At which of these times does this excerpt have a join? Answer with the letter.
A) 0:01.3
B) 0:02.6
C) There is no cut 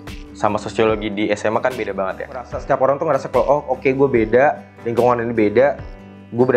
B